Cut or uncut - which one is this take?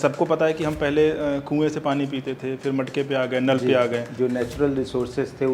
cut